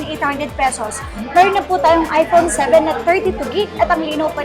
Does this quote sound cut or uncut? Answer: uncut